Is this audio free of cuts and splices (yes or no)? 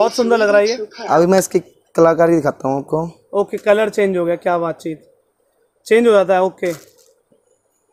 yes